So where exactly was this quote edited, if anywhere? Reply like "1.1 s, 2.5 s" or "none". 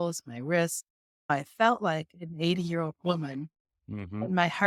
1.3 s